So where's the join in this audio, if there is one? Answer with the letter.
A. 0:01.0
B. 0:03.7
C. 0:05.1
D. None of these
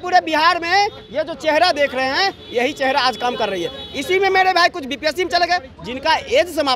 D